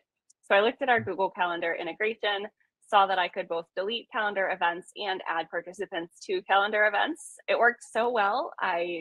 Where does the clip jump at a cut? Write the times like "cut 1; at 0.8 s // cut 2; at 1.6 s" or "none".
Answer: cut 1; at 7.3 s